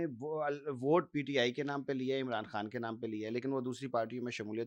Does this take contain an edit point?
no; 0 cuts

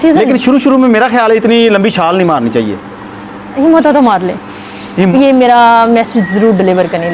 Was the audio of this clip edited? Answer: yes; 1 cut; at 5.1 s

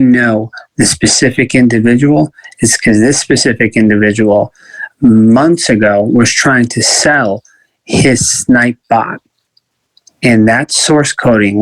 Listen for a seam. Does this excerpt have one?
no; 0 cuts

